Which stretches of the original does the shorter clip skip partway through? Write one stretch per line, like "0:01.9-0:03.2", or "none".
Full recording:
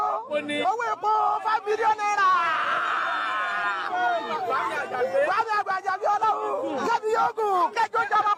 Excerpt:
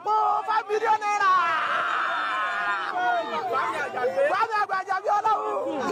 none